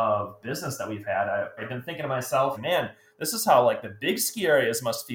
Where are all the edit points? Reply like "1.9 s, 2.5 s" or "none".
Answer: 2.6 s